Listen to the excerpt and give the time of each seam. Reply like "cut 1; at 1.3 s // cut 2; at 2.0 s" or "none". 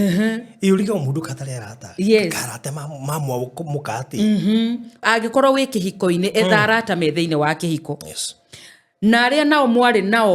cut 1; at 5.0 s